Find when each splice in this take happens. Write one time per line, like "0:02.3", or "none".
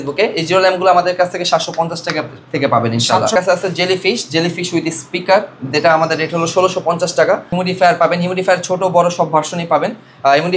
0:03.3
0:07.5